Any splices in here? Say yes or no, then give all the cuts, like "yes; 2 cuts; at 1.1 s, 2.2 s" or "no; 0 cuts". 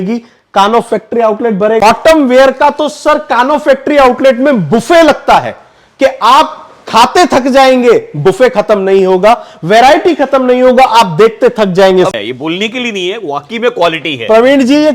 yes; 2 cuts; at 1.8 s, 12.1 s